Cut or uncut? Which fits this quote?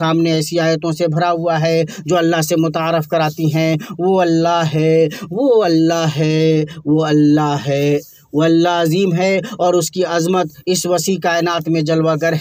uncut